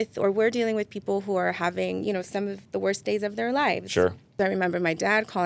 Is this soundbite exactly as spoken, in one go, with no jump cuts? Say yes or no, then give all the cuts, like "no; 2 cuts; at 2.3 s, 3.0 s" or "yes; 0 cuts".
no; 1 cut; at 4.3 s